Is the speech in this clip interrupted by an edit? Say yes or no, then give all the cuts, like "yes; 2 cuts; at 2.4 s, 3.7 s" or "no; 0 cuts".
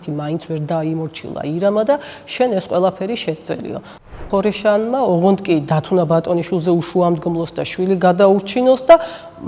yes; 1 cut; at 4.2 s